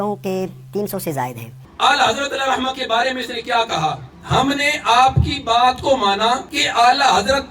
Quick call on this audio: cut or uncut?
cut